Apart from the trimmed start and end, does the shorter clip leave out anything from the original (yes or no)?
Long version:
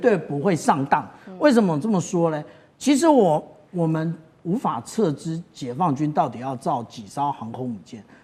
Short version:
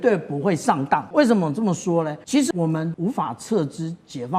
yes